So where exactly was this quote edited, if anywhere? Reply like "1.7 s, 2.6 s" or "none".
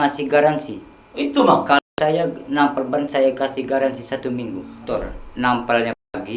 4.9 s

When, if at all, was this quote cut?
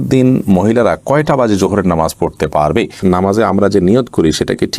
3.0 s

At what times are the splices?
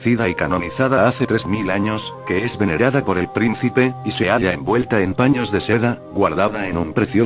none

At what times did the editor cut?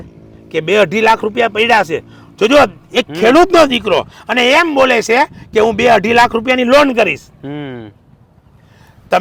none

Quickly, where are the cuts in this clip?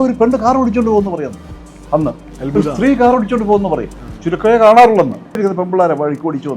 5.4 s

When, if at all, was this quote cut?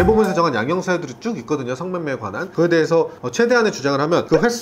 none

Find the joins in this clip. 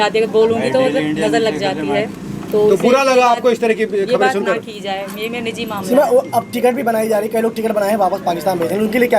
none

